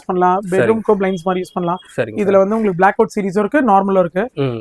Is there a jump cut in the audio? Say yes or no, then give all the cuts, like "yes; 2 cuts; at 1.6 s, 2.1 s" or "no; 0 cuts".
no; 0 cuts